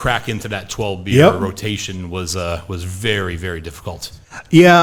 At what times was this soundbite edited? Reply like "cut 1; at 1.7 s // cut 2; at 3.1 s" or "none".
none